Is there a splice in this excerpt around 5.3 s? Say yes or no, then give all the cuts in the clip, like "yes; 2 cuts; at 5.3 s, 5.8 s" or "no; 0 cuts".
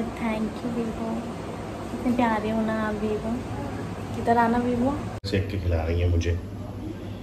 yes; 1 cut; at 5.3 s